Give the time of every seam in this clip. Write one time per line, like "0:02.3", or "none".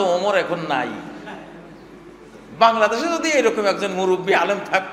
none